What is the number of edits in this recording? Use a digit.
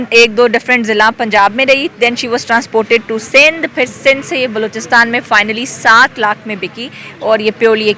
0